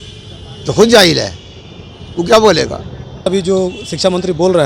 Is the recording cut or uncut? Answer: cut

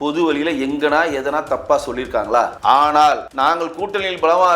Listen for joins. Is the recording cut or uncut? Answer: cut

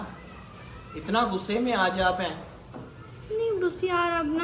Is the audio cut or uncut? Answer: uncut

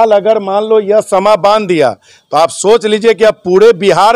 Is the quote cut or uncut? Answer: uncut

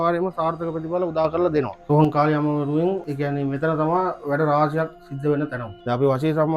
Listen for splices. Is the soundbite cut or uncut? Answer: cut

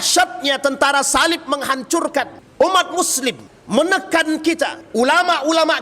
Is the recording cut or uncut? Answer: cut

